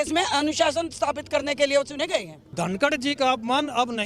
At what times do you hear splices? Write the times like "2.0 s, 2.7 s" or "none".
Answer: 2.4 s

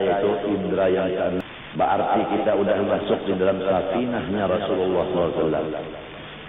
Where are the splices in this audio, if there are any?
1.4 s

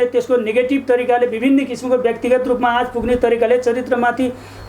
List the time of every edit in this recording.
none

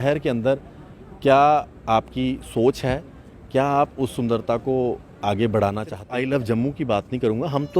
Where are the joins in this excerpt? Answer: 6.0 s

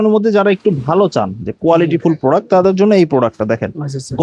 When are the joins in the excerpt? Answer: none

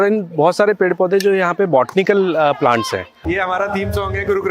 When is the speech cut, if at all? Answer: 3.2 s

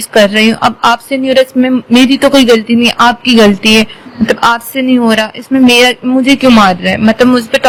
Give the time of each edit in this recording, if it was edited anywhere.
none

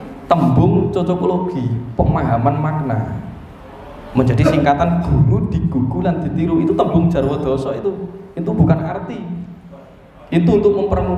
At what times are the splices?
none

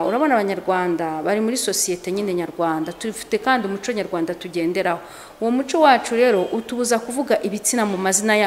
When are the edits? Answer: none

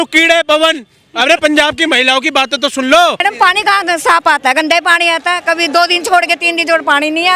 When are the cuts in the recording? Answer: 3.2 s

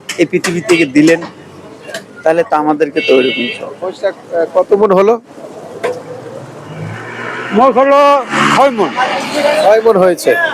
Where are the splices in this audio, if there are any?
3.9 s

